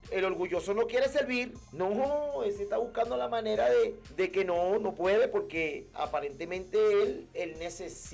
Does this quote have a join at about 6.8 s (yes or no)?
no